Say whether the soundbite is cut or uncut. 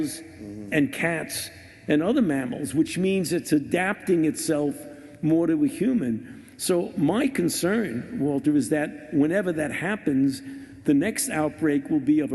cut